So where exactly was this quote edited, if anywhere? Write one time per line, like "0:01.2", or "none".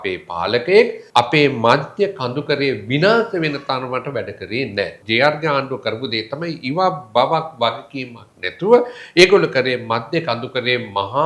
0:01.0
0:05.0